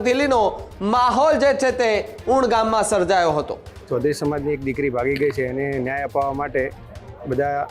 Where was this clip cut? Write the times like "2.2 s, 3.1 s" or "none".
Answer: 3.7 s